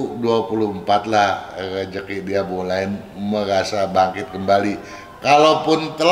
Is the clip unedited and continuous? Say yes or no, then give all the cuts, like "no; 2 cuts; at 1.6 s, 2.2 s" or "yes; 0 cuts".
yes; 0 cuts